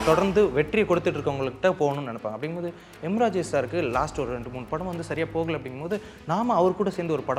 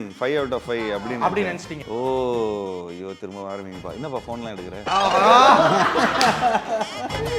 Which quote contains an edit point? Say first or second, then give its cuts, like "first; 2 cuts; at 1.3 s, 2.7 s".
second; 1 cut; at 1.7 s